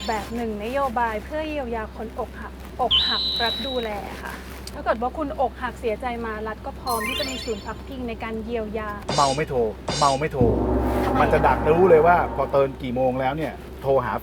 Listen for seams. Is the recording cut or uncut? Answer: cut